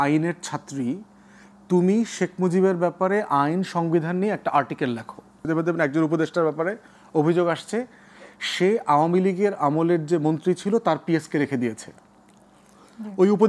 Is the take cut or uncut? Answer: cut